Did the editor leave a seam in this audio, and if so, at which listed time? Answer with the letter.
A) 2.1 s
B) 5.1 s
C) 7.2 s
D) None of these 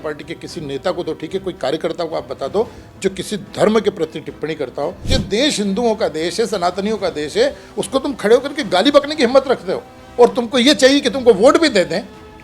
B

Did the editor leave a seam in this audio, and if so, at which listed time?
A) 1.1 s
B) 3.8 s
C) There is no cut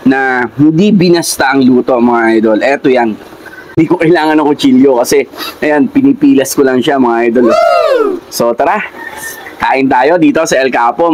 B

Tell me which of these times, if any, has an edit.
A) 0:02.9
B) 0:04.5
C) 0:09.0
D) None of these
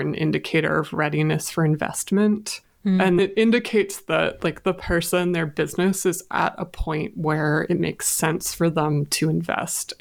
A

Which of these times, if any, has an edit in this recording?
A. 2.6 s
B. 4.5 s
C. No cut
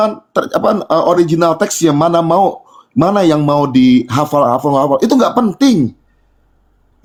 C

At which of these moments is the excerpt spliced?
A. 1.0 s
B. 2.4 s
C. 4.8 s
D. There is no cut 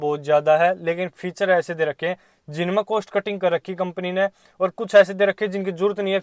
D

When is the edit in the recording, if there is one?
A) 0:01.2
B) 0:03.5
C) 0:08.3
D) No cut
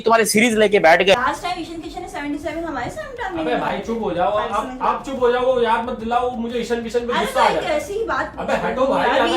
A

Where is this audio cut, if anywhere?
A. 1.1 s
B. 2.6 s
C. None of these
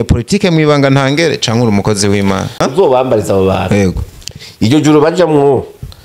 B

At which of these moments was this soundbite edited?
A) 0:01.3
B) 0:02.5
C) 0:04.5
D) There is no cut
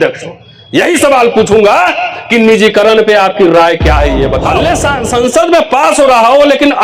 C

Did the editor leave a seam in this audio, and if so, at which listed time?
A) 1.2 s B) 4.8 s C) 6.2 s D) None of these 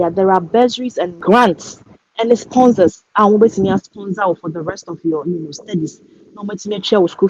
A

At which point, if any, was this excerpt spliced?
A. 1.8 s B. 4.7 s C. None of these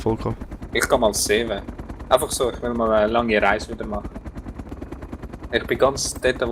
B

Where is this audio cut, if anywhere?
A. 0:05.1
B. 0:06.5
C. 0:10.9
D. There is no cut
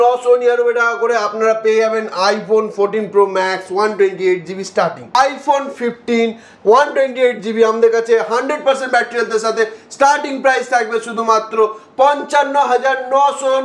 A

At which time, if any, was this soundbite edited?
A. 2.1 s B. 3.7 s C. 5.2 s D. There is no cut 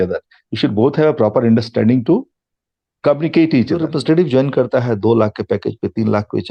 B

